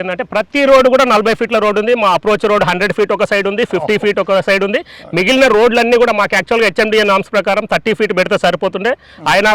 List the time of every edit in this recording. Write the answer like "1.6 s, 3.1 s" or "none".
none